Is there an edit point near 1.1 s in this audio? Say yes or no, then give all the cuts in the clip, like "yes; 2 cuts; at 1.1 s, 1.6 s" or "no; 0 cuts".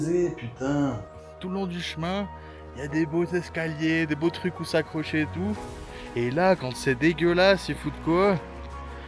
yes; 1 cut; at 1.1 s